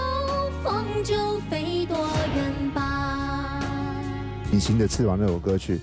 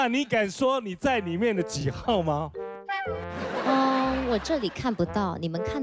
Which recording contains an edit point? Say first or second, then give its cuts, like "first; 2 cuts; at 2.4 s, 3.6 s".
first; 1 cut; at 4.5 s